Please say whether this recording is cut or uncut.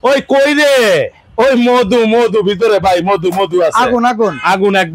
uncut